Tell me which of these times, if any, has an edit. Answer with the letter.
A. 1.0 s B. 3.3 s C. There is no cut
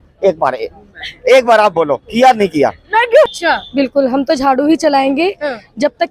B